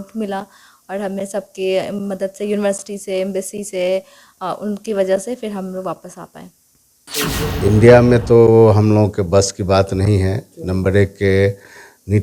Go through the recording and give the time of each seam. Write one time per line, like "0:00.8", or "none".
0:07.0